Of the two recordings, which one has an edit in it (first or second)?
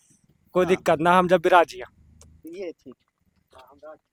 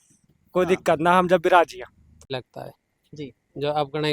second